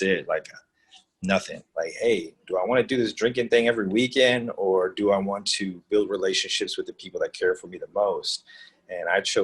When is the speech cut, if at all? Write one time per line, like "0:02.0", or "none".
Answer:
0:01.6